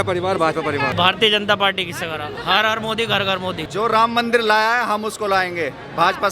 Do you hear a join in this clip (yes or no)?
yes